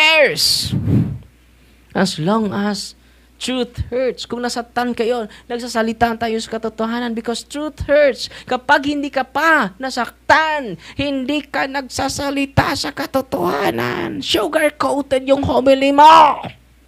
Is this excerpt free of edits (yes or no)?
yes